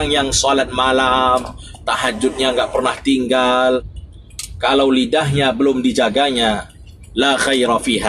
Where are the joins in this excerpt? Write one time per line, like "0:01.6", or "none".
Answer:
0:04.0